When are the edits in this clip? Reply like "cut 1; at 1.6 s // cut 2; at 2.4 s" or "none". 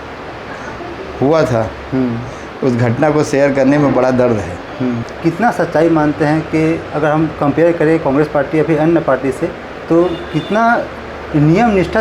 cut 1; at 5.1 s